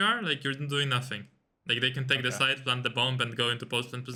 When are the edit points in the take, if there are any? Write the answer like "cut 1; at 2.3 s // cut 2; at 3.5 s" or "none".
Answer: none